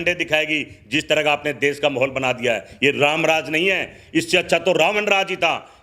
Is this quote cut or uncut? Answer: uncut